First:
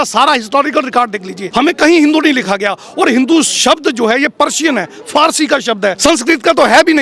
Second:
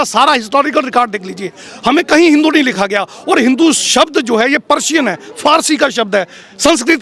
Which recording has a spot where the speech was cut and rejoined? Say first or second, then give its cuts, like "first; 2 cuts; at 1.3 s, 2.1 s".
first; 2 cuts; at 1.4 s, 6.0 s